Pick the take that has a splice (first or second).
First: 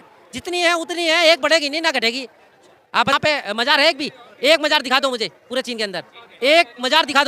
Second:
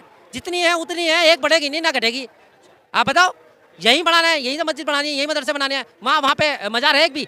first